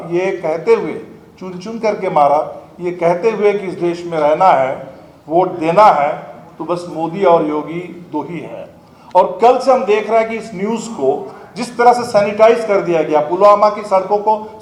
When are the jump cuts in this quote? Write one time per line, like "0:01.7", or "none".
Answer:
none

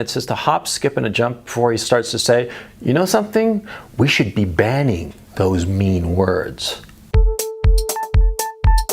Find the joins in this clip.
0:06.9

